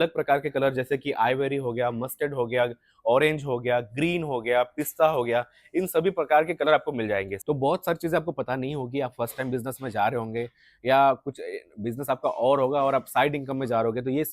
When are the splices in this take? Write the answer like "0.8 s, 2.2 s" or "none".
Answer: 7.3 s